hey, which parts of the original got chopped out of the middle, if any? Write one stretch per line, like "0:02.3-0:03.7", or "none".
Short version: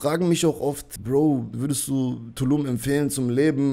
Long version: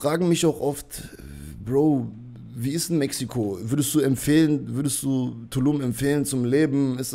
0:00.9-0:01.5
0:02.1-0:04.7